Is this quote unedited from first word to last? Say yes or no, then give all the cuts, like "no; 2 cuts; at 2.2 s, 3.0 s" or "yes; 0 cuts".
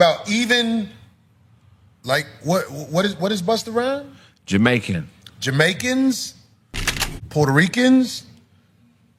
yes; 0 cuts